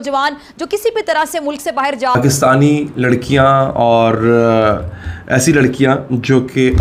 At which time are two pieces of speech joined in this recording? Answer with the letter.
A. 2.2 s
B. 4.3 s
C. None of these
A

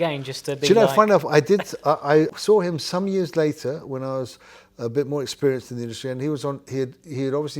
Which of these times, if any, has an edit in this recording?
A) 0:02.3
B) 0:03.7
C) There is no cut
A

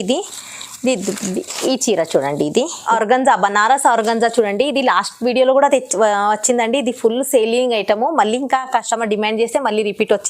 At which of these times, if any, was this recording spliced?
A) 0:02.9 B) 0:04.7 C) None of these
A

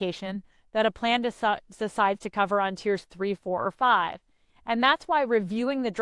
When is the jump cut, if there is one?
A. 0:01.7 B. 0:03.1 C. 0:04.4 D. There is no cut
D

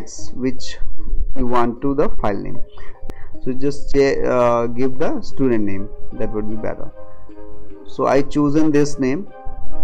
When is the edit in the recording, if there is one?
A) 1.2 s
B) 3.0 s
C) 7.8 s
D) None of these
B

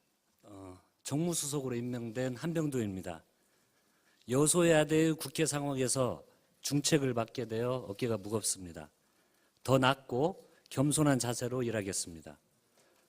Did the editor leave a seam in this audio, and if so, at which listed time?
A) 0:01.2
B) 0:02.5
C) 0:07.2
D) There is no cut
A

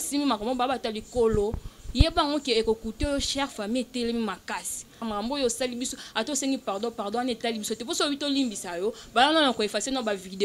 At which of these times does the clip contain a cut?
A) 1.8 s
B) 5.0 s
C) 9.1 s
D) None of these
B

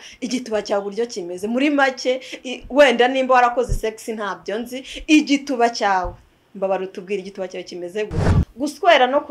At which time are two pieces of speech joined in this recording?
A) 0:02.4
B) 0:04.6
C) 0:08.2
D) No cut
C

